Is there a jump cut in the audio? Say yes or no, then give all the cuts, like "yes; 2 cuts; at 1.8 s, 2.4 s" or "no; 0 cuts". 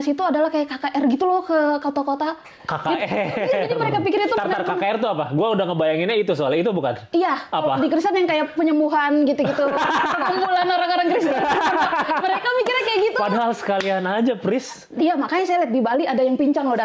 no; 0 cuts